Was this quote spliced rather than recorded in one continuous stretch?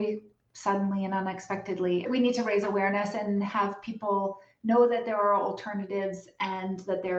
yes; 1 cut; at 2.1 s

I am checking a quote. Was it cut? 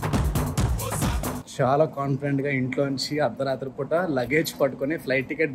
yes; 1 cut; at 1.5 s

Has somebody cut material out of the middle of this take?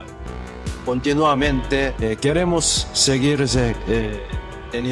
yes; 1 cut; at 1.9 s

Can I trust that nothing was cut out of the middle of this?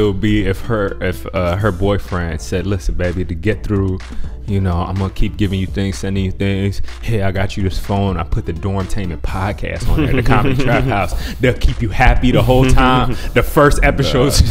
yes; 0 cuts

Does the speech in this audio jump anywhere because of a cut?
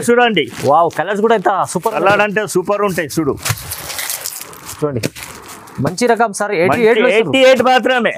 no; 0 cuts

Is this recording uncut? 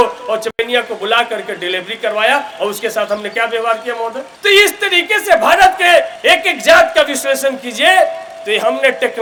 yes; 0 cuts

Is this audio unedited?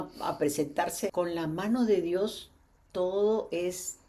no; 1 cut; at 1.1 s

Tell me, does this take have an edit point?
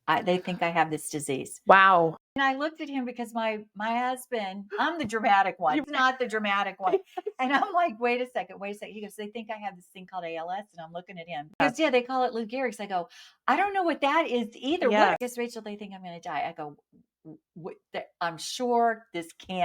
yes; 4 cuts; at 2.3 s, 5.8 s, 11.6 s, 15.2 s

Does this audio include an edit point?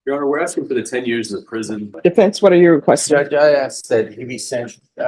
yes; 1 cut; at 1.9 s

